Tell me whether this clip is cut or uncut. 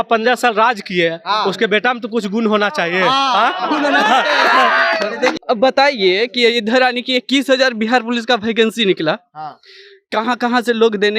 cut